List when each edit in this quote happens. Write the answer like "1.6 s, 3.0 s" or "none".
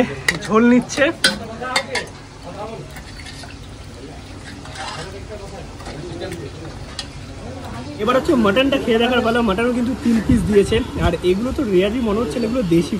8.0 s